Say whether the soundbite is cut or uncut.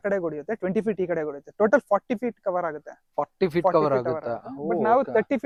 uncut